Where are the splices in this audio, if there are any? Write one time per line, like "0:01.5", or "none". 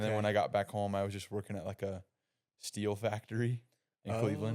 none